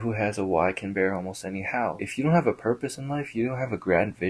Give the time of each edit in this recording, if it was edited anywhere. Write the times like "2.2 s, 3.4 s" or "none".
2.0 s